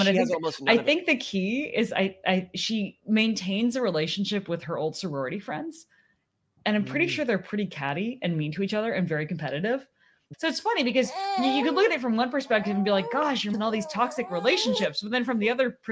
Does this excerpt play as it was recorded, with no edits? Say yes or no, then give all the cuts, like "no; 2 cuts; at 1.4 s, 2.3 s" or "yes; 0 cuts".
no; 2 cuts; at 10.3 s, 13.5 s